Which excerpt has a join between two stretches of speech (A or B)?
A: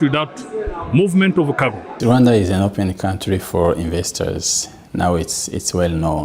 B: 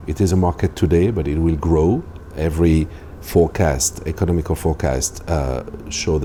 A